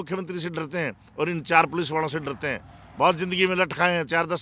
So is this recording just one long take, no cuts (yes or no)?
yes